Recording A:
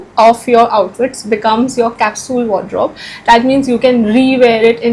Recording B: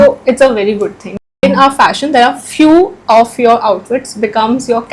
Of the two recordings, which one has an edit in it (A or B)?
B